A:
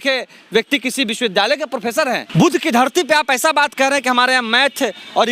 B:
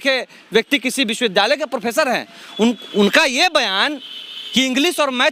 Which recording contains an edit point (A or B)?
A